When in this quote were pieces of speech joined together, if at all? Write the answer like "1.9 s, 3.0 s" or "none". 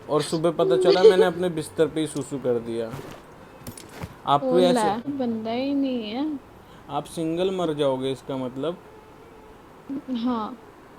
5.1 s